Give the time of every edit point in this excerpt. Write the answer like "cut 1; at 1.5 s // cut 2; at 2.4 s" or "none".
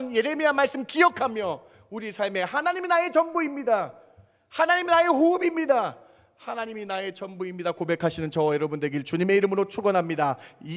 none